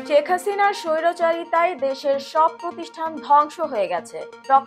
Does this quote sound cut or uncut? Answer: uncut